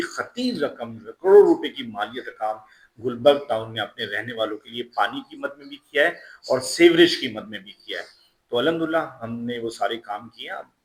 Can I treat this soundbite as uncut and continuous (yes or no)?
yes